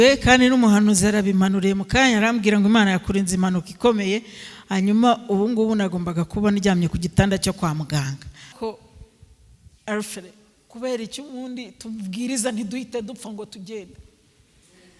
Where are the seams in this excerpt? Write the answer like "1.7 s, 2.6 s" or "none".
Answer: 8.5 s